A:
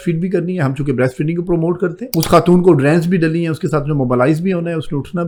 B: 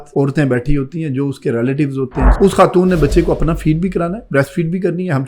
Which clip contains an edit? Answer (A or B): B